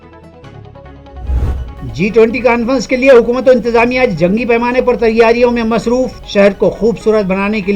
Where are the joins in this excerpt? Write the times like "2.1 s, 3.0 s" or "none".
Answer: none